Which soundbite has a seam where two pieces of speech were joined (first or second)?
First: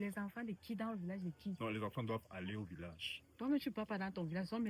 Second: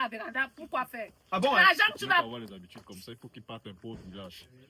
second